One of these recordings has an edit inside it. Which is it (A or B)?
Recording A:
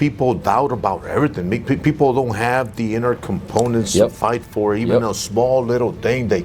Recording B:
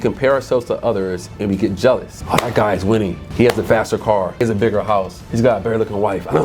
B